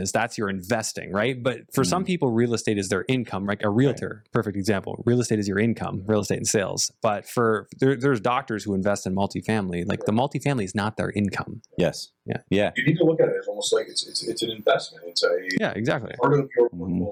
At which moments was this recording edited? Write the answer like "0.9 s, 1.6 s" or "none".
none